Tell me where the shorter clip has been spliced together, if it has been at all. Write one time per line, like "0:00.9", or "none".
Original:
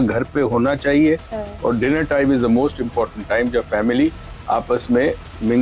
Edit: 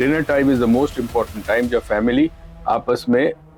none

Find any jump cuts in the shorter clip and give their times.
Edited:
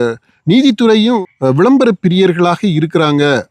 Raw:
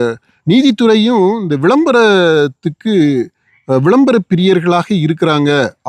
0:01.2

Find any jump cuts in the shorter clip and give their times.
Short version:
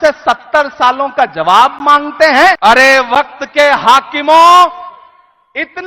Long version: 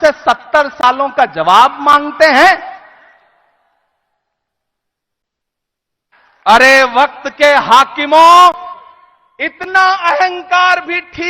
0:02.6

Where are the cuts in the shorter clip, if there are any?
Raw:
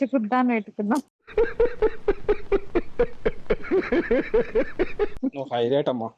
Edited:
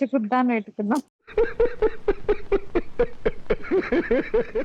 none

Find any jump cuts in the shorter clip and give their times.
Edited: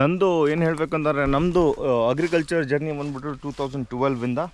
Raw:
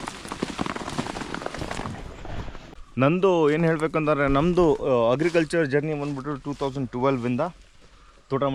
none

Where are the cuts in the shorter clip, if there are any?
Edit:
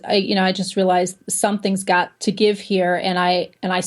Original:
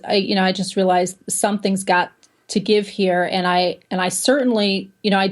0:02.1

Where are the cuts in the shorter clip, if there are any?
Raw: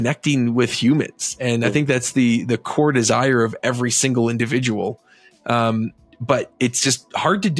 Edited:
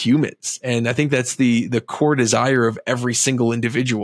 none

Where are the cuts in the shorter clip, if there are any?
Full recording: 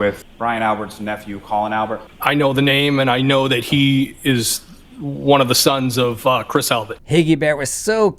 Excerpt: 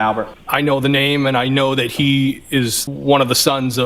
0:02.9

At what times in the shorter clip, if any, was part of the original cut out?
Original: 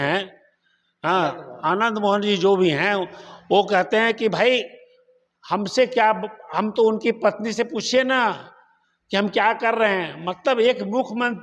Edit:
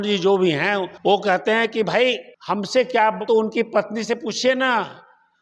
0:00.9
0:02.3
0:03.2

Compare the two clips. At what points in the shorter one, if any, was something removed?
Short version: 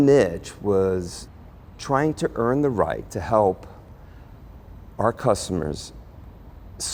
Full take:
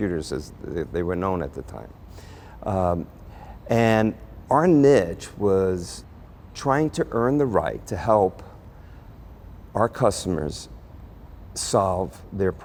none

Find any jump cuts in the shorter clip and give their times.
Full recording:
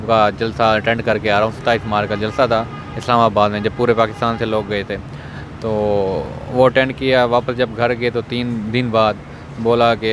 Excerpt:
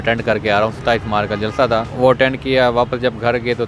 0:01.9

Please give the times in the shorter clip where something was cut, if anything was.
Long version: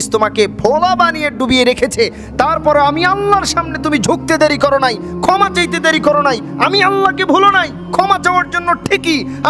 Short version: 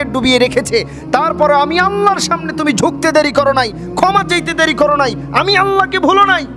none

